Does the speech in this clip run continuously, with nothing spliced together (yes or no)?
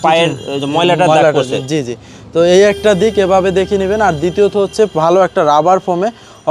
yes